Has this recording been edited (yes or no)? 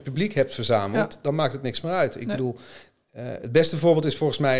no